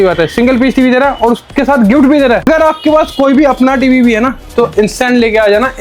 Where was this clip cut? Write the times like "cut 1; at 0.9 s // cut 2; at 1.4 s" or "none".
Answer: cut 1; at 2.5 s